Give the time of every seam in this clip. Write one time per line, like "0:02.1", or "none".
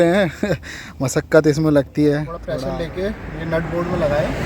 0:02.4